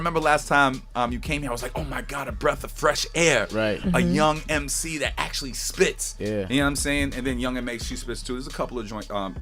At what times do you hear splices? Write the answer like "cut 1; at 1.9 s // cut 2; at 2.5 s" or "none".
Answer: cut 1; at 8.4 s